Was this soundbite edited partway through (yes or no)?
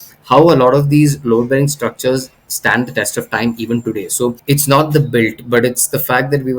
yes